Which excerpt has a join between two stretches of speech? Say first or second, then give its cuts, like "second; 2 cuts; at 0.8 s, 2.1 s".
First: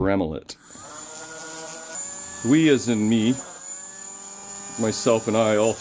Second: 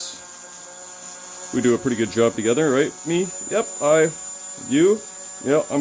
first; 1 cut; at 2.0 s